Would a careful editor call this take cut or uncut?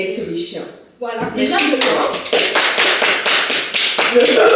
uncut